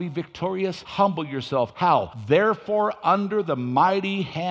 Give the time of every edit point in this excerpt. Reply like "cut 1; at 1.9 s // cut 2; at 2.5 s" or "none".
cut 1; at 0.8 s // cut 2; at 1.9 s